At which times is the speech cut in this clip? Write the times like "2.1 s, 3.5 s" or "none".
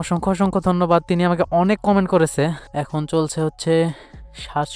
2.6 s